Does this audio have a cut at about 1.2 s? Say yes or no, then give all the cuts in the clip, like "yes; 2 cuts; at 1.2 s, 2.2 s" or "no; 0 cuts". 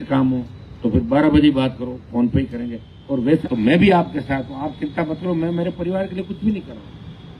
no; 1 cut; at 3.4 s